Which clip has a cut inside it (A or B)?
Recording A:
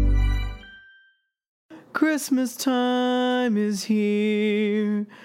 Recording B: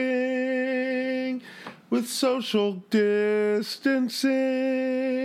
A